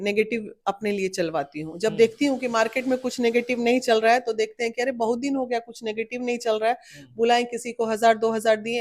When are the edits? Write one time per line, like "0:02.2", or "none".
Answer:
none